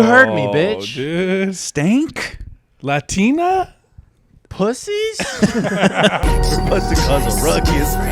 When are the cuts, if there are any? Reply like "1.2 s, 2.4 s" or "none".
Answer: 6.2 s

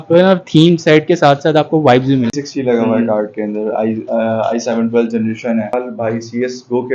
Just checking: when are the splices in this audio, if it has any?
2.3 s, 5.7 s

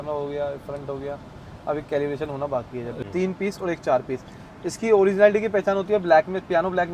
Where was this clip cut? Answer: 3.0 s

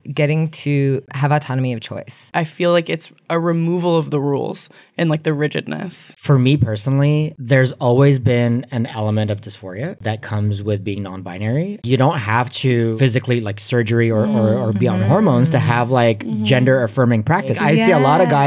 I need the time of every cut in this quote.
2.3 s, 6.2 s, 11.8 s, 13.0 s, 17.6 s

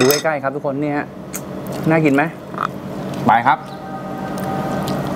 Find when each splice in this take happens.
none

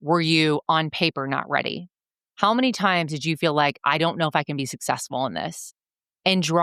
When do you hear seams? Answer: none

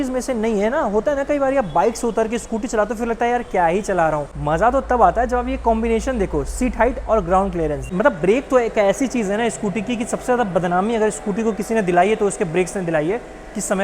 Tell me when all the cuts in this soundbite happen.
4.3 s, 7.8 s

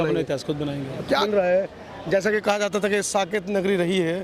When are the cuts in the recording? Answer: 1.2 s

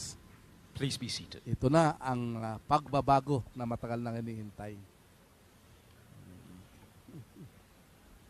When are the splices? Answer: 2.6 s

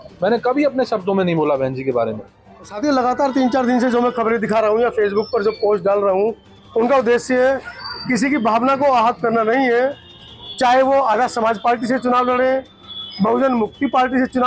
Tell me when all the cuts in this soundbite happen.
2.7 s

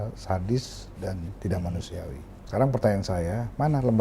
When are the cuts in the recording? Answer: 2.3 s

